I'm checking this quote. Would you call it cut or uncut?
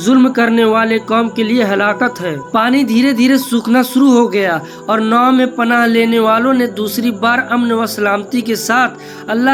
uncut